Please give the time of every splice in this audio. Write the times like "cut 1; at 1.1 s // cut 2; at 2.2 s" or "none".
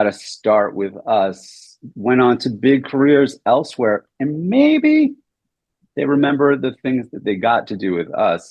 none